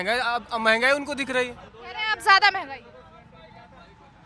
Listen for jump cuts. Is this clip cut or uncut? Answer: uncut